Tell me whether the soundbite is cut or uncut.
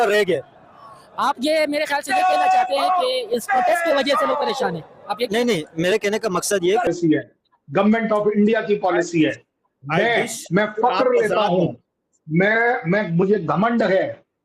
cut